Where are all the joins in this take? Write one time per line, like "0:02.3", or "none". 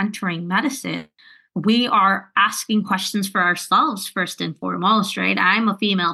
none